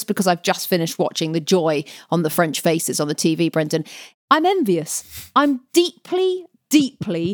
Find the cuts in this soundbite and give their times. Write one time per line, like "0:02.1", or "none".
0:04.0